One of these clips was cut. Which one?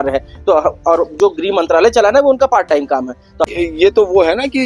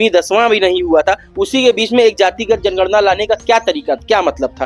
first; 1 cut; at 3.4 s

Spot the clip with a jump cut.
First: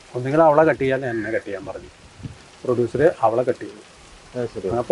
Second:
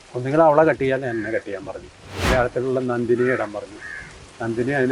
second; 1 cut; at 2.3 s

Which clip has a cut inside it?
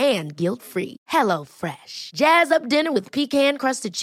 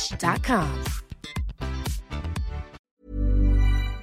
second; 1 cut; at 2.8 s

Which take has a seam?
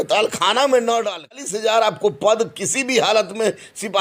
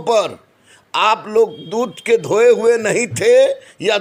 first; 1 cut; at 1.4 s

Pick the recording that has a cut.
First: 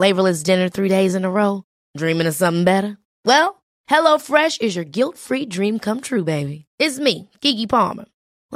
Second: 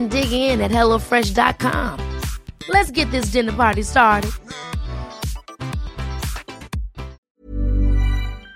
second; 1 cut; at 7.2 s

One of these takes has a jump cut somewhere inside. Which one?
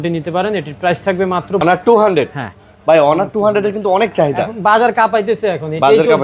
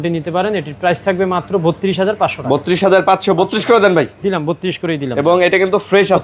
first; 1 cut; at 1.6 s

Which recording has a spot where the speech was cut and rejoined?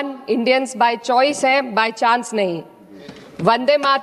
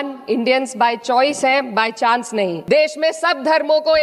second; 1 cut; at 2.6 s

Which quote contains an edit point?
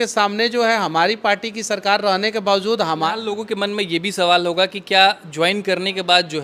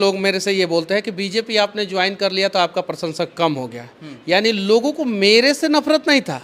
first; 1 cut; at 3.1 s

